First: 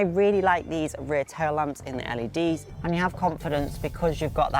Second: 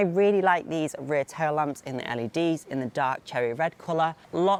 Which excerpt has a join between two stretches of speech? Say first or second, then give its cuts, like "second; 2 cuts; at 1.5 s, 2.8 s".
first; 1 cut; at 2.7 s